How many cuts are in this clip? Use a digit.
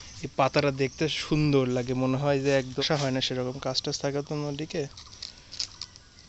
1